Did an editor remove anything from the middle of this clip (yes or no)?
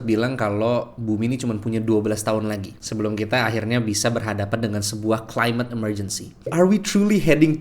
yes